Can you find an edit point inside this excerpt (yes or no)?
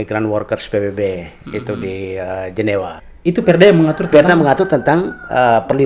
yes